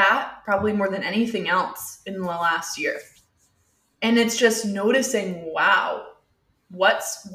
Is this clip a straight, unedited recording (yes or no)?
yes